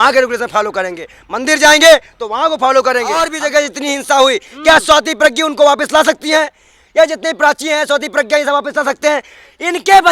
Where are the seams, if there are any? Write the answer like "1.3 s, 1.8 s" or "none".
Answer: 3.3 s